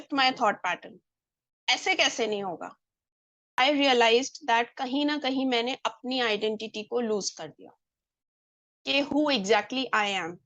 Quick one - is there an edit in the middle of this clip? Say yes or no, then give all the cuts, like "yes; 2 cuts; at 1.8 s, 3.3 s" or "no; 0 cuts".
yes; 1 cut; at 3.6 s